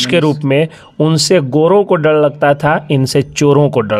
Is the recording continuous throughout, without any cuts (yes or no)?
yes